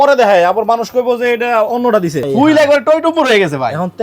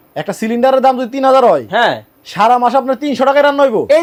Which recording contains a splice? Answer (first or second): first